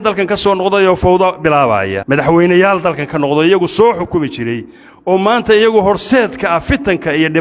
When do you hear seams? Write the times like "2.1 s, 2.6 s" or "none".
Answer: 2.0 s